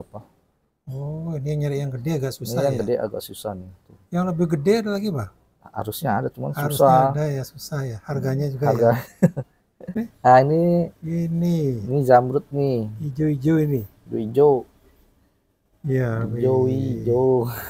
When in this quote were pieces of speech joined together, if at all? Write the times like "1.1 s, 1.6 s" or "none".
10.0 s